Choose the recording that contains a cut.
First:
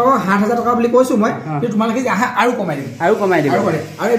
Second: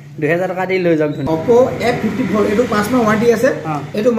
second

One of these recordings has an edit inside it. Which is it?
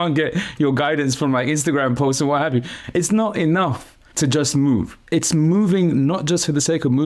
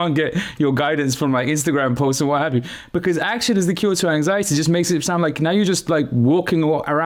first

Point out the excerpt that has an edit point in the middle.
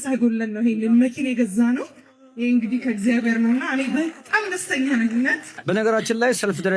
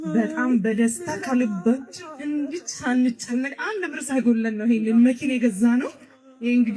first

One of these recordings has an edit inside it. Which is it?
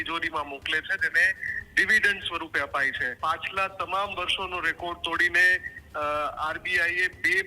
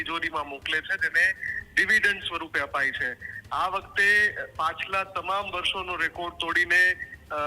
first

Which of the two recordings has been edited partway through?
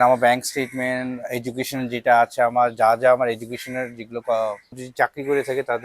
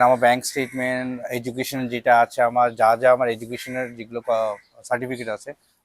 first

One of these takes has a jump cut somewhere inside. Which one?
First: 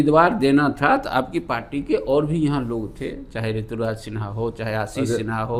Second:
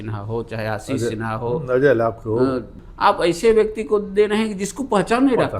second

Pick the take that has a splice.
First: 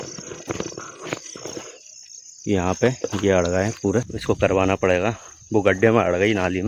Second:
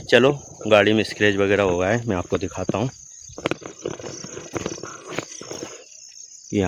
first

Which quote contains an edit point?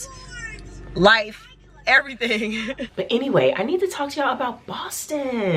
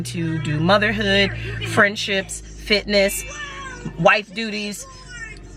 first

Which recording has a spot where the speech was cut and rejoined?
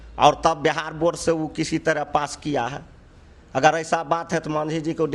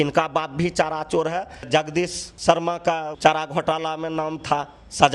second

